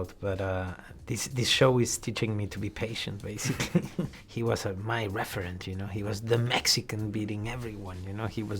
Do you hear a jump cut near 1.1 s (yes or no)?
no